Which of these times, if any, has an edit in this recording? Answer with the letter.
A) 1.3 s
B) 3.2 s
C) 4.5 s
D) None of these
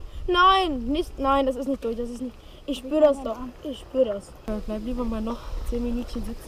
C